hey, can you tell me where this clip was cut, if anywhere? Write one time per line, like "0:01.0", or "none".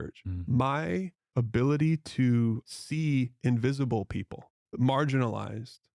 0:01.2
0:02.7
0:04.7